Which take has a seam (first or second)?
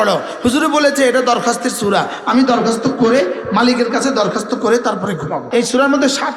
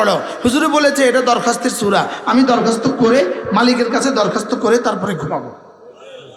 first